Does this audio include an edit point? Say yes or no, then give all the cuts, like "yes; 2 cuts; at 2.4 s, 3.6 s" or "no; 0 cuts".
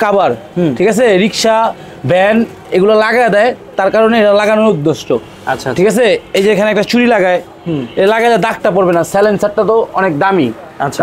no; 0 cuts